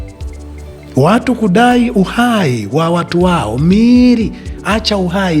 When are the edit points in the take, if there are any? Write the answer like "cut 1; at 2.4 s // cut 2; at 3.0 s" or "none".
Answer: cut 1; at 0.9 s